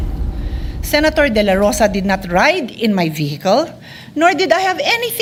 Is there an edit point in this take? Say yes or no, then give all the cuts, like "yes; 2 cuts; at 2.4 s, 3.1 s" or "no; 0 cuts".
no; 0 cuts